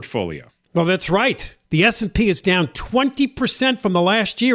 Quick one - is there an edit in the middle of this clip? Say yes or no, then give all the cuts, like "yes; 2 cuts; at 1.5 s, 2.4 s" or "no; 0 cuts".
no; 0 cuts